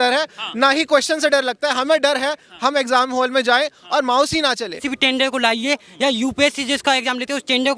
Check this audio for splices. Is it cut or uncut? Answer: cut